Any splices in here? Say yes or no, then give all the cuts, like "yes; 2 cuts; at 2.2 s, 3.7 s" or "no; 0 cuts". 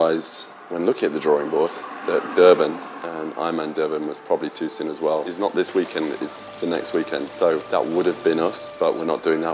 yes; 1 cut; at 5.3 s